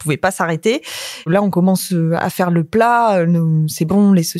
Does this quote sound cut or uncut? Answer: cut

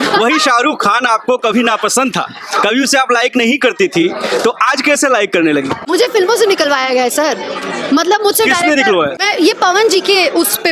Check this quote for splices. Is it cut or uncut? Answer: cut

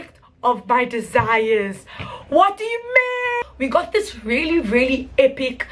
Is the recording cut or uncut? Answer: cut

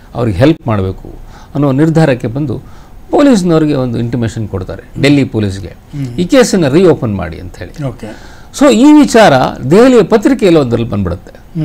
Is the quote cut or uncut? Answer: uncut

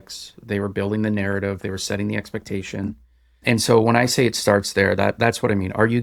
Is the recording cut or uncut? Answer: uncut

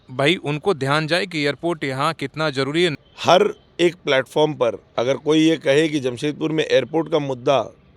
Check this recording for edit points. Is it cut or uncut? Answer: uncut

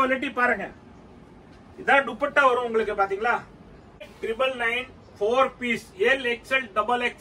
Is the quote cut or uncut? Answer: cut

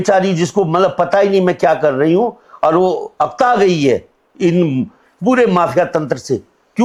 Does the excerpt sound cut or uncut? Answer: uncut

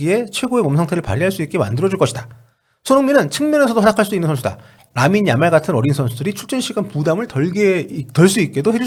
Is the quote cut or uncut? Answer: uncut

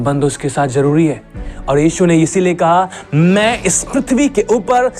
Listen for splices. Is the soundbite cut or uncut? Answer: uncut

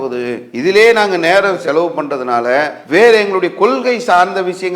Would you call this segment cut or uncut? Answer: cut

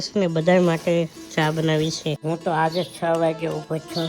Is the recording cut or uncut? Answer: cut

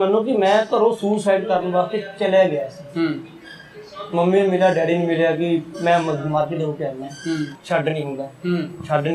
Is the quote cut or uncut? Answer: cut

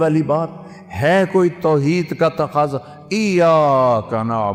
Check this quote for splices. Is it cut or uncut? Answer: uncut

